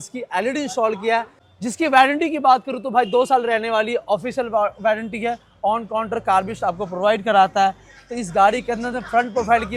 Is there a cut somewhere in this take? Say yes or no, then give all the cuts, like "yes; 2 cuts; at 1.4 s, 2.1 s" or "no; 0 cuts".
no; 0 cuts